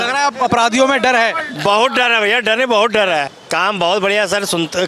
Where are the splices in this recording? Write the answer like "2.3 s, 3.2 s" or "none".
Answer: 3.4 s